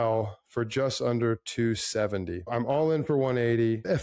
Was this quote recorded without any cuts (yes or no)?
no